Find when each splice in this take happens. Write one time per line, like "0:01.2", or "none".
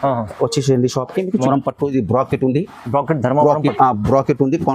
0:01.5